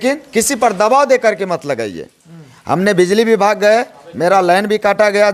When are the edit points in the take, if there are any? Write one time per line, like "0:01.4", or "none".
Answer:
none